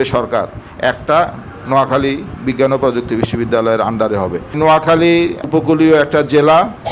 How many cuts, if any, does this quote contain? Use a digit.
2